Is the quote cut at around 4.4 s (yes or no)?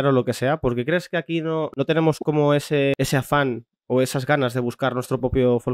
no